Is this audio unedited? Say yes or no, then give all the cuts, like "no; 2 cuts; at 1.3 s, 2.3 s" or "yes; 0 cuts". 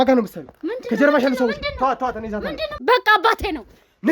no; 1 cut; at 2.7 s